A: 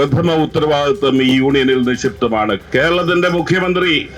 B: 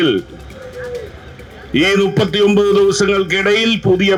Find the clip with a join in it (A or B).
A